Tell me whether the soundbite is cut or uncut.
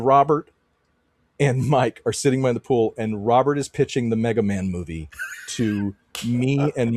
uncut